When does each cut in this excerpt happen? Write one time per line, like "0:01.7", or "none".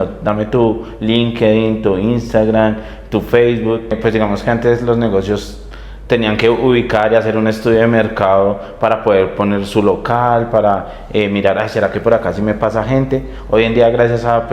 0:04.0